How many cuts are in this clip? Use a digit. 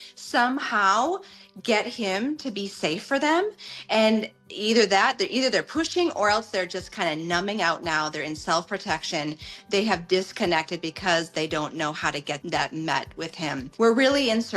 2